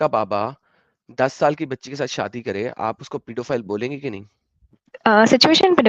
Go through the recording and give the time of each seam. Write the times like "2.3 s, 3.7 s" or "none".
4.9 s